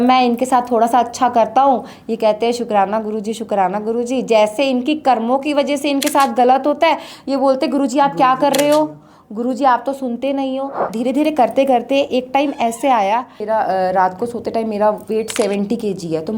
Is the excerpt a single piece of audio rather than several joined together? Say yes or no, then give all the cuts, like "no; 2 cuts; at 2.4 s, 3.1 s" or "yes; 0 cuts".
no; 2 cuts; at 10.9 s, 13.4 s